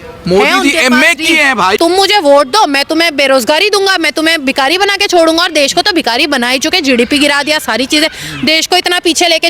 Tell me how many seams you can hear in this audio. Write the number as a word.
one